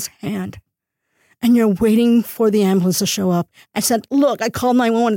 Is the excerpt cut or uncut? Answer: cut